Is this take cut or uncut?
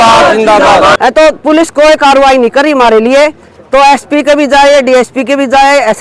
cut